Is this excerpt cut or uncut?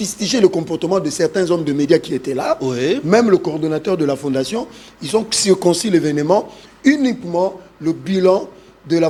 uncut